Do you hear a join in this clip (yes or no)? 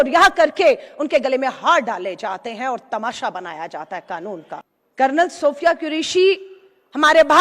yes